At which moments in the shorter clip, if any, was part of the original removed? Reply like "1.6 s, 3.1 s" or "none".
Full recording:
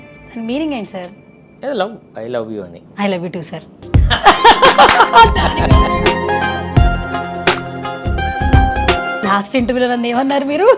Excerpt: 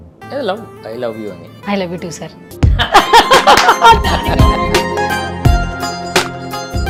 none